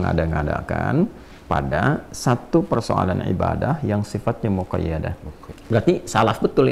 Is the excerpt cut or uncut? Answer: cut